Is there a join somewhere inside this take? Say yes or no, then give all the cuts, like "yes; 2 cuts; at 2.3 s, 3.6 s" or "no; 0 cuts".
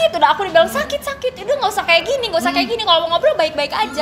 no; 0 cuts